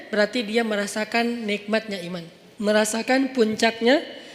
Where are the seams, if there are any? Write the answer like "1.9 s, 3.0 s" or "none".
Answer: 2.4 s